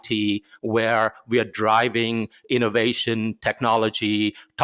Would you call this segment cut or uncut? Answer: uncut